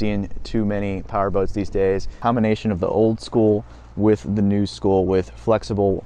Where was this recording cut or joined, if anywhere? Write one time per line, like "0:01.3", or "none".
0:02.1